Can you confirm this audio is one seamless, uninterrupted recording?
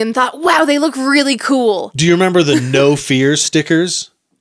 yes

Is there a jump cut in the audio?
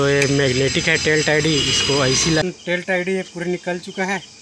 yes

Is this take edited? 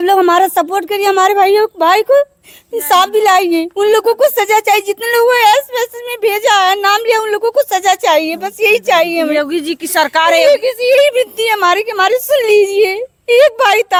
no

